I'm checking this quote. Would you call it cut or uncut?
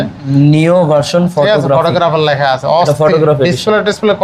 uncut